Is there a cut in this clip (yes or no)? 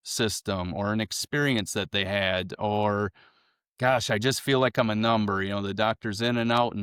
no